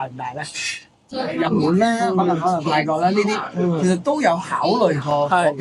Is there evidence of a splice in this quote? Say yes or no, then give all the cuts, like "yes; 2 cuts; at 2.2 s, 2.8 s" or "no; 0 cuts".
yes; 1 cut; at 0.9 s